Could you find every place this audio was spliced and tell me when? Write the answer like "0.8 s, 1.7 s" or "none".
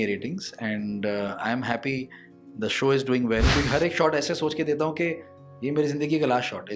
3.5 s